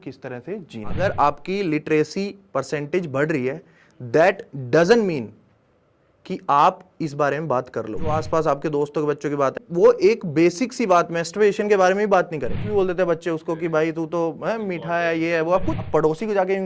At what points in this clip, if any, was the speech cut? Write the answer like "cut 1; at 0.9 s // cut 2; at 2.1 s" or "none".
cut 1; at 1.0 s // cut 2; at 8.2 s // cut 3; at 9.6 s // cut 4; at 12.6 s // cut 5; at 15.8 s

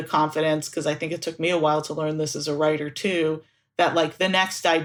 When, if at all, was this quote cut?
none

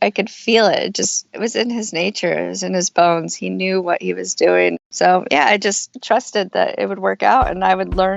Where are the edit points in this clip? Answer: cut 1; at 1.4 s // cut 2; at 4.7 s

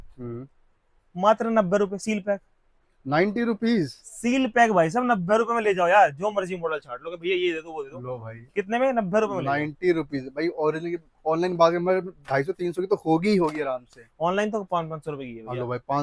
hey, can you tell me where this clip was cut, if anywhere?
none

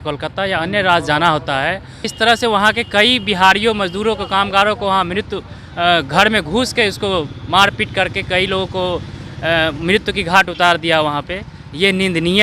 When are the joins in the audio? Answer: cut 1; at 2.1 s

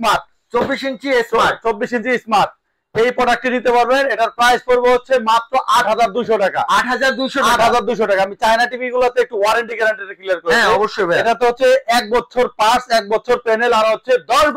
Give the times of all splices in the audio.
none

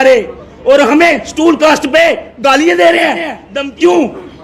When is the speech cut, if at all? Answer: cut 1; at 3.4 s

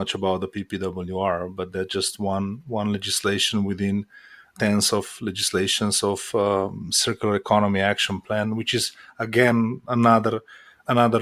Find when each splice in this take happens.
none

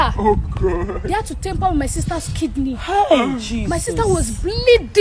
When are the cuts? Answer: none

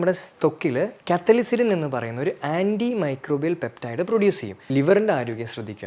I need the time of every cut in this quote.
cut 1; at 4.5 s

